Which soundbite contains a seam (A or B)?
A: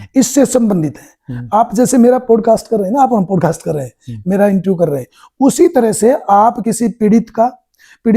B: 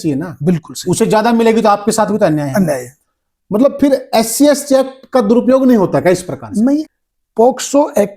B